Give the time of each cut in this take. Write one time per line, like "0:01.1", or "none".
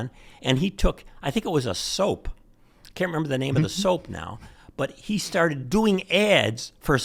none